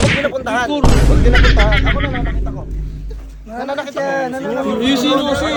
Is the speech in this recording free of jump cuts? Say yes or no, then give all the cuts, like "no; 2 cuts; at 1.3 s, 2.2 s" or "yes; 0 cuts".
yes; 0 cuts